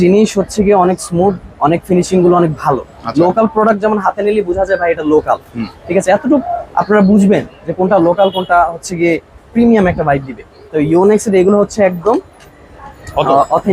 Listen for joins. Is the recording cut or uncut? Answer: uncut